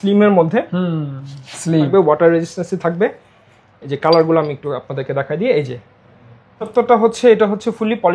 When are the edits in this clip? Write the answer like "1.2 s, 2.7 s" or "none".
1.9 s, 6.7 s